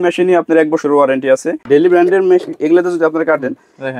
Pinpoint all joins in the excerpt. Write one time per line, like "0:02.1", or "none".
0:01.6